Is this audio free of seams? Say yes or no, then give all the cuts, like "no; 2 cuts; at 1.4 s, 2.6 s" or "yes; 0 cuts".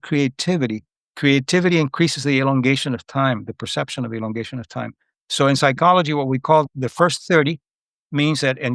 no; 1 cut; at 6.7 s